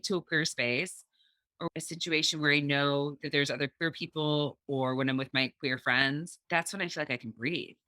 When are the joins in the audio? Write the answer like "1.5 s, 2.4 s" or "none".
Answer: 1.7 s, 6.4 s